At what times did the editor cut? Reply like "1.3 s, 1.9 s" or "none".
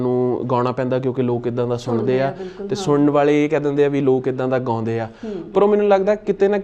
none